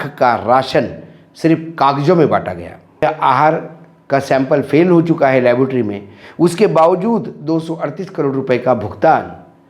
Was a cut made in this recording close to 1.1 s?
no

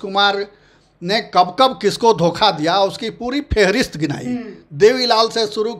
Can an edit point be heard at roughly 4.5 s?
no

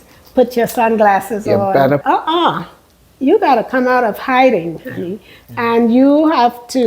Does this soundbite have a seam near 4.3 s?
no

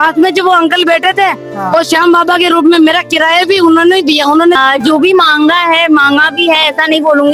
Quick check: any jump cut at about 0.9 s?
no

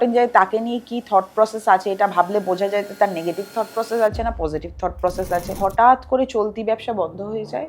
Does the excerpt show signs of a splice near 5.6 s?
yes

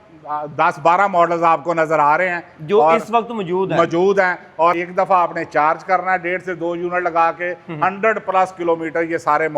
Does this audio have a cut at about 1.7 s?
no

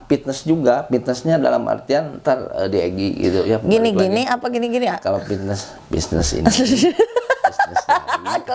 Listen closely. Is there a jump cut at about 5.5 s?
no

